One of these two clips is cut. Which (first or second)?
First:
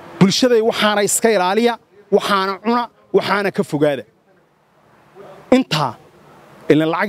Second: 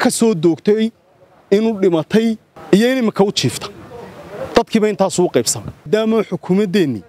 second